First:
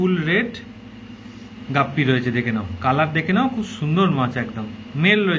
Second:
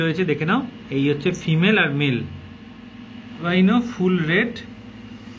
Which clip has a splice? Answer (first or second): second